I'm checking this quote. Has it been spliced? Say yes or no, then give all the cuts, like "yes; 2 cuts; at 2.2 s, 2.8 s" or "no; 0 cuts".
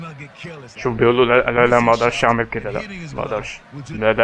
no; 0 cuts